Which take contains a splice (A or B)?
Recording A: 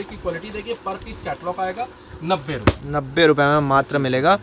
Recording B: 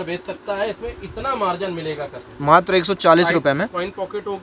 B